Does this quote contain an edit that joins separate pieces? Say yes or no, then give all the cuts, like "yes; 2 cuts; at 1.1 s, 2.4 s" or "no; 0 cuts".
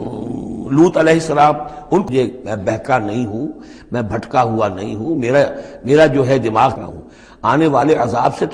yes; 2 cuts; at 2.1 s, 6.8 s